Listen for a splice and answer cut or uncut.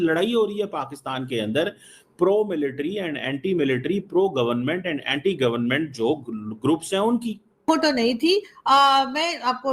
cut